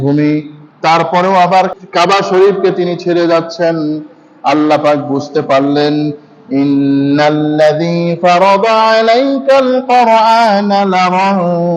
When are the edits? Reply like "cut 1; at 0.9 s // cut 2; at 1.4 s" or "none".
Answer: cut 1; at 1.7 s